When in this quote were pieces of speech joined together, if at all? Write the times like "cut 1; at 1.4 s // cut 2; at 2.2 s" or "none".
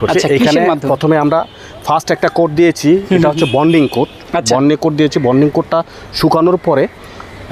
none